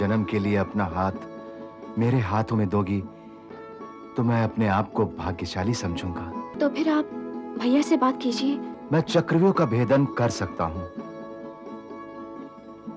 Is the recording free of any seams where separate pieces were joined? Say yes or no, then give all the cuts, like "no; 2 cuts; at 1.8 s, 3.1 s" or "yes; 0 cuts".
no; 2 cuts; at 6.5 s, 8.7 s